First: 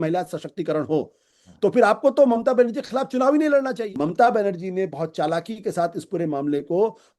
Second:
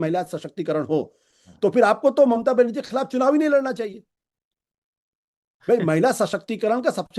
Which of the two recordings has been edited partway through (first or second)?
first